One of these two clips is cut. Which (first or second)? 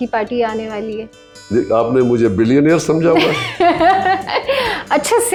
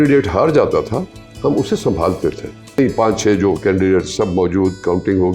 second